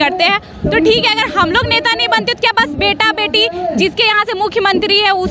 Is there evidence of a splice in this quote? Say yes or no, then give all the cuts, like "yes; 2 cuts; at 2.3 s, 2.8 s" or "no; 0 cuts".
no; 0 cuts